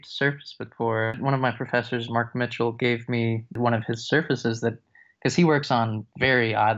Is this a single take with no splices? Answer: no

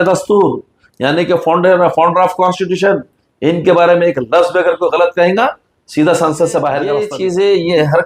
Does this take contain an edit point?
yes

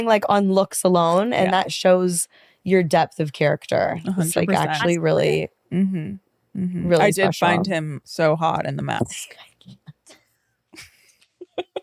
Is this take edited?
no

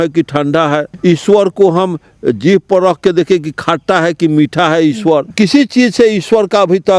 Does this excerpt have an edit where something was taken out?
yes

